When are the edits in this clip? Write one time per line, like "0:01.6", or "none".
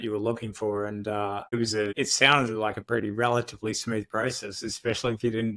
0:01.6